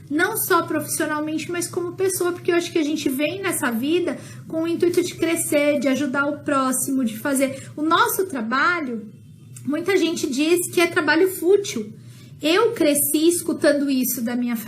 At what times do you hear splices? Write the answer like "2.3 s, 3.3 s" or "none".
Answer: none